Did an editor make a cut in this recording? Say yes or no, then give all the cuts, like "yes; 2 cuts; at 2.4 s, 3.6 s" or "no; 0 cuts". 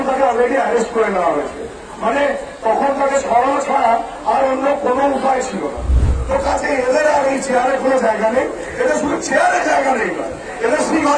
yes; 1 cut; at 6.1 s